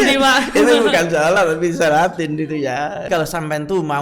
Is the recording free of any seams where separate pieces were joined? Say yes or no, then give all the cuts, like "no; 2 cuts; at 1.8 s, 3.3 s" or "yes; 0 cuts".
no; 1 cut; at 3.1 s